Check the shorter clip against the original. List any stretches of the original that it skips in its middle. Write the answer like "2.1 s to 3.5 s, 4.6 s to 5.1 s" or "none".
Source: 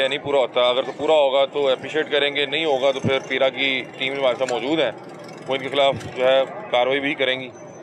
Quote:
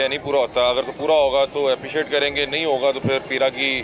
none